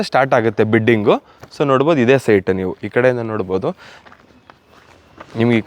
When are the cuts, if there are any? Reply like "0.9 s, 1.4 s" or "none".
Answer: none

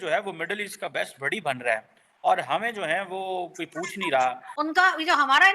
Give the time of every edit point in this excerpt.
4.5 s

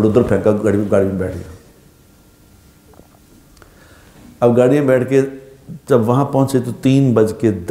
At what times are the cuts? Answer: none

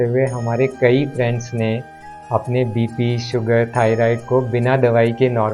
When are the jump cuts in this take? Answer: none

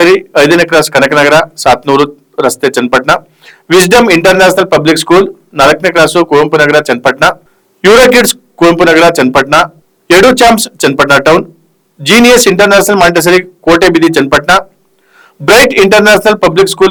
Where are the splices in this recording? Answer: none

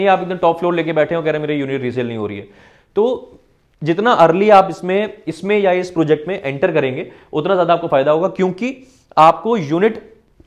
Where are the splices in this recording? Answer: none

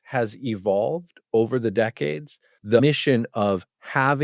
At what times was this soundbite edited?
2.8 s

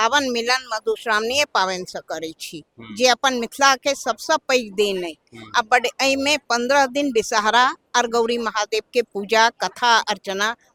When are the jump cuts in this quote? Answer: none

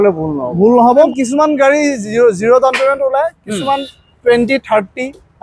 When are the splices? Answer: 0.9 s

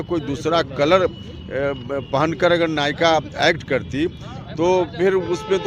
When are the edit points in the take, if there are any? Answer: none

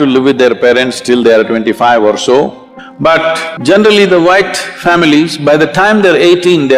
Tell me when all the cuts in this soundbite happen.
3.0 s

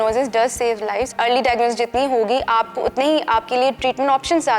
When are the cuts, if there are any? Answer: 1.1 s

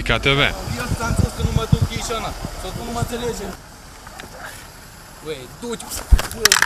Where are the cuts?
2.8 s

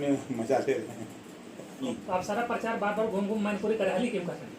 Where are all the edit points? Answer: 1.9 s

